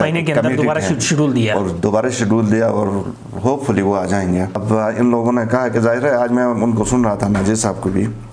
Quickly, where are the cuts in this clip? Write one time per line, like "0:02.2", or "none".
0:04.6